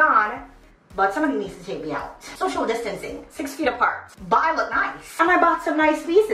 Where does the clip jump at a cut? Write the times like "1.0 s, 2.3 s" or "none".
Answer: 2.2 s, 4.1 s, 5.0 s